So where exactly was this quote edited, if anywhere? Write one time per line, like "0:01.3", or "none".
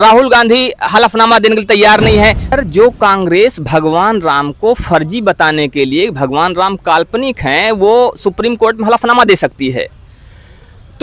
0:02.5